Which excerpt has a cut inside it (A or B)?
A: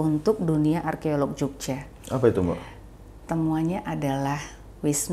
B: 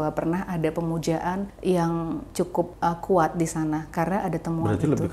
B